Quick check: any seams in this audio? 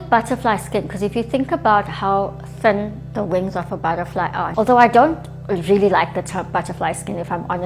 no; 0 cuts

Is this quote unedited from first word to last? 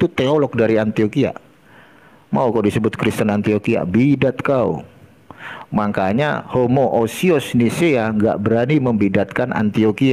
yes; 0 cuts

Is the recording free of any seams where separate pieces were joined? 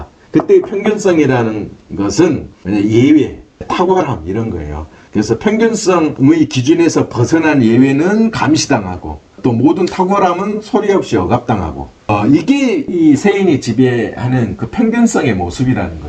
no; 3 cuts; at 2.5 s, 3.6 s, 6.1 s

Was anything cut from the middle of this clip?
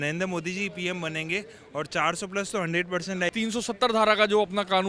yes; 1 cut; at 3.3 s

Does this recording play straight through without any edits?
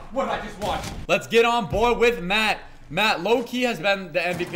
no; 1 cut; at 0.9 s

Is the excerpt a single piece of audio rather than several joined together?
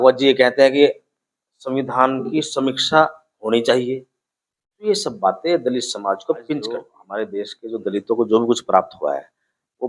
no; 1 cut; at 7.0 s

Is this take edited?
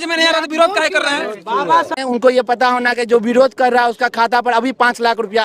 yes; 1 cut; at 2.0 s

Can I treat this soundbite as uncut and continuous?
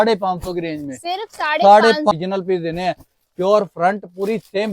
no; 1 cut; at 2.1 s

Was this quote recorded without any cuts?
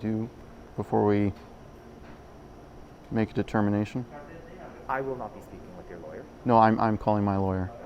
yes; 0 cuts

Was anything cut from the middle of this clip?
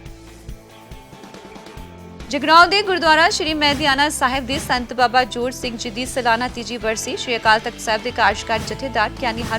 no; 0 cuts

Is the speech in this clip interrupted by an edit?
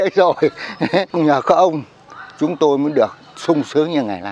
yes; 2 cuts; at 1.1 s, 3.3 s

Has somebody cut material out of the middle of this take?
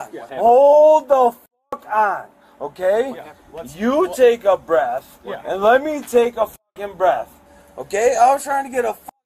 no; 0 cuts

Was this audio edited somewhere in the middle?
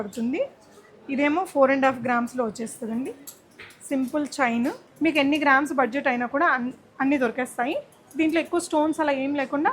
yes; 1 cut; at 4.9 s

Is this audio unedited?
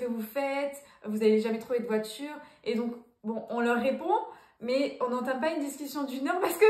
yes; 0 cuts

